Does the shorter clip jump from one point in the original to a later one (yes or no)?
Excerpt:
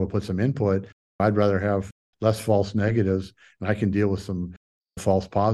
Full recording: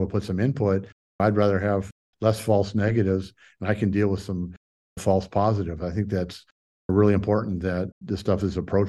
no